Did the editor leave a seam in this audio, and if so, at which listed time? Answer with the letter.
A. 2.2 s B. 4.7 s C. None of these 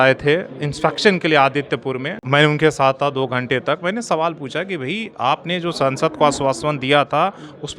A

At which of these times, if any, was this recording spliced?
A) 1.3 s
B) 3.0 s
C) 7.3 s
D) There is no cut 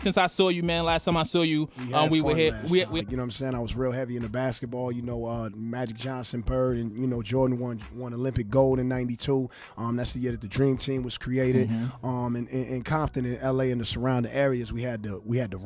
D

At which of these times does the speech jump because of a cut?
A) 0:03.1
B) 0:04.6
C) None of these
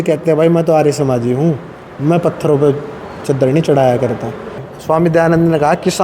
B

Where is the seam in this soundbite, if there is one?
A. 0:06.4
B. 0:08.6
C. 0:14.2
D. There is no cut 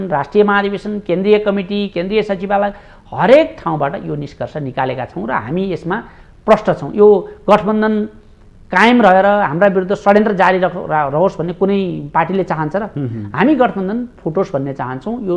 D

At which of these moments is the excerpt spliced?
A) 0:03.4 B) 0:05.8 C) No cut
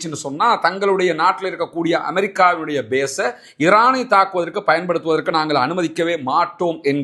C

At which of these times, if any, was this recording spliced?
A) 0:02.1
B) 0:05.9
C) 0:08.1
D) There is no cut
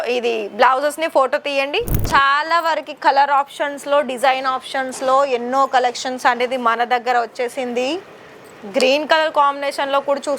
A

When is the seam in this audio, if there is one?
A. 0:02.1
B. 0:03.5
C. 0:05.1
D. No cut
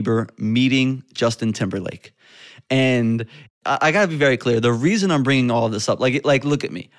B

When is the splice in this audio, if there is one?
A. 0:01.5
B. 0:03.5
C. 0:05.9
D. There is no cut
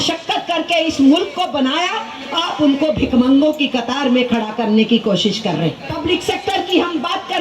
C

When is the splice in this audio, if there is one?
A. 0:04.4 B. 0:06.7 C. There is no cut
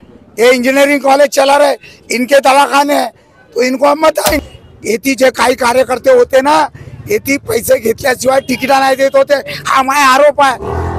A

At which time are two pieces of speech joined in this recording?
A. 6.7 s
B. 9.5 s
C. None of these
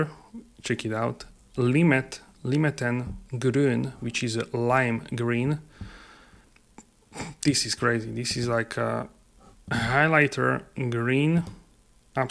C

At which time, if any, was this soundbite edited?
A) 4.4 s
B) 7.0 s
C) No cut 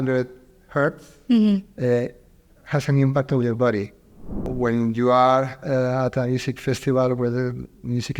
A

